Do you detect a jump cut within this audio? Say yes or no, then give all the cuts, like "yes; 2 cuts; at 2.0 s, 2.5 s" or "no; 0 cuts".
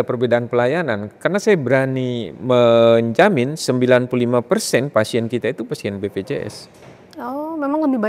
no; 0 cuts